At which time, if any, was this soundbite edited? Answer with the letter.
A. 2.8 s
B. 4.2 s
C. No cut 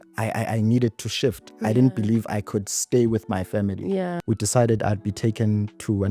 B